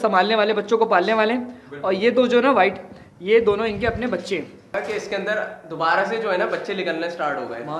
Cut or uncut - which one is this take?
cut